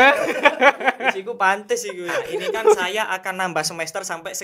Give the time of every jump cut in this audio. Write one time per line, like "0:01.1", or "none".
0:02.8